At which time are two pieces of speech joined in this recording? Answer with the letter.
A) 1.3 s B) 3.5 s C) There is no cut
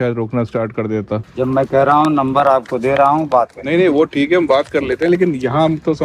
A